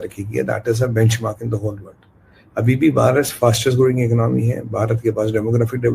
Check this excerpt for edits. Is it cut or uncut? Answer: uncut